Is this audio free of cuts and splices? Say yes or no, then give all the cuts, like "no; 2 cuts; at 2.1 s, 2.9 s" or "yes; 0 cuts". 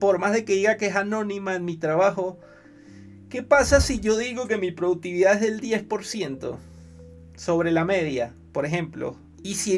yes; 0 cuts